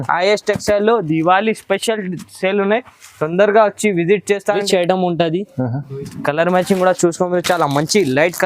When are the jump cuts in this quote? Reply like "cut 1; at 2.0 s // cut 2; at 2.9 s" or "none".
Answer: cut 1; at 4.6 s